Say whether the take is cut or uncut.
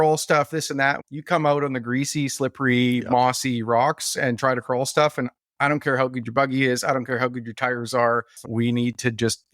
cut